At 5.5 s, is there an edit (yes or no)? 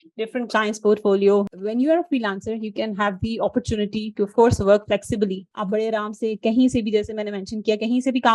yes